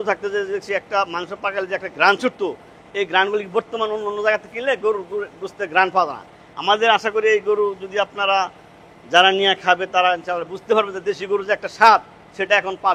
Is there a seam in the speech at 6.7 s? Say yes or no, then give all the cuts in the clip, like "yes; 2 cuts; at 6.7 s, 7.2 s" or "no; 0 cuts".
no; 0 cuts